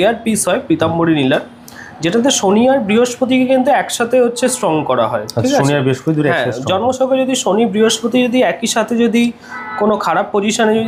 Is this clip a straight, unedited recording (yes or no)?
yes